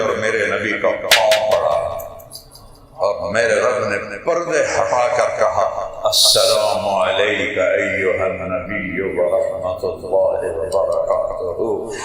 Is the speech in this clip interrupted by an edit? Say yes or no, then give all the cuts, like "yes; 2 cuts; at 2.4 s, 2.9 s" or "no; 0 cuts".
no; 0 cuts